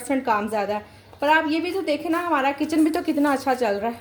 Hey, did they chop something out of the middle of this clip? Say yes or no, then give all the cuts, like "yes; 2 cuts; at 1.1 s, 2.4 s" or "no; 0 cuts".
no; 0 cuts